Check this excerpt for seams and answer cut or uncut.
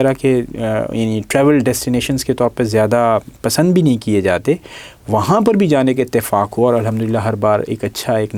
uncut